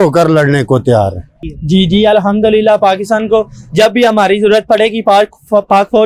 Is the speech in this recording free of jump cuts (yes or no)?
yes